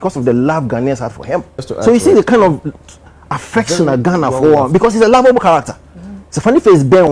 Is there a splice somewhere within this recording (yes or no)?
yes